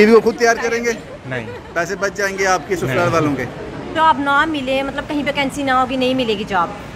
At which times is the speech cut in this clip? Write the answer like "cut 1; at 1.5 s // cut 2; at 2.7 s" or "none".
cut 1; at 3.9 s

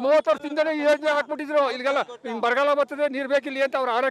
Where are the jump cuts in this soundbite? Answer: none

